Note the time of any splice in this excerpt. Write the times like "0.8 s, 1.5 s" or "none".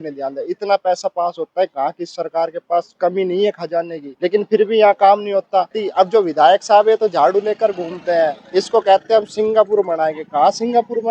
4.0 s, 5.8 s